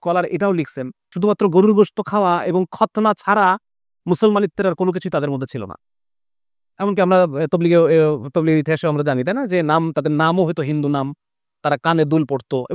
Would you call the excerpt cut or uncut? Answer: uncut